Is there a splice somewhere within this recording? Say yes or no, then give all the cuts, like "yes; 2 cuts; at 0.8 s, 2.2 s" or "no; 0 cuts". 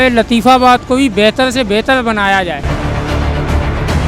yes; 1 cut; at 2.6 s